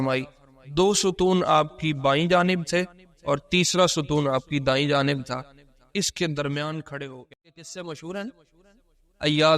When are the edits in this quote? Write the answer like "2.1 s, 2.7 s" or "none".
7.3 s